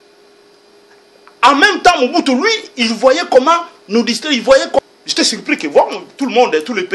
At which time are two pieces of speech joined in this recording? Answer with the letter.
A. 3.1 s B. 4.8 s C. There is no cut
B